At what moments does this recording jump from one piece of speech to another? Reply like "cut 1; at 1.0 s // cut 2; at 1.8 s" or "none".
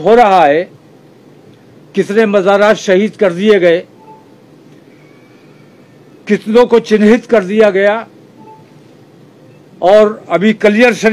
none